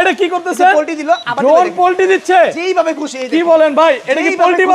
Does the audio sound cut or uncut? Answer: uncut